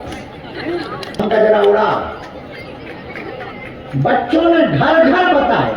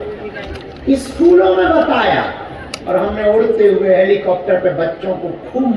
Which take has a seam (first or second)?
first